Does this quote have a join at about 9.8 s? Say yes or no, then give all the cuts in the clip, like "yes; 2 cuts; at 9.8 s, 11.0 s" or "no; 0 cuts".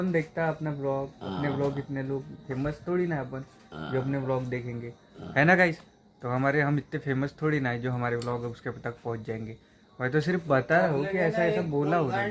no; 0 cuts